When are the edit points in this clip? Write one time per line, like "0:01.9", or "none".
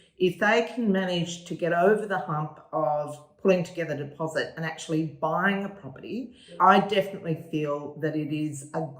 0:06.5